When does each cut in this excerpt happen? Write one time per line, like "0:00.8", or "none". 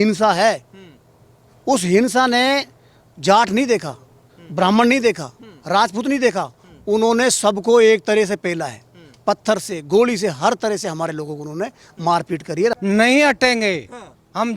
0:12.8